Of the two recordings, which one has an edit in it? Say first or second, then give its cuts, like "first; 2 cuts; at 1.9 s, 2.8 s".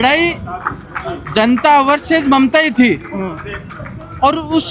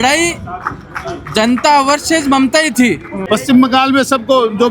second; 1 cut; at 3.1 s